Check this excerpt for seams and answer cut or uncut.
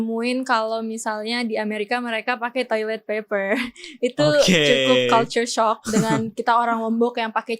uncut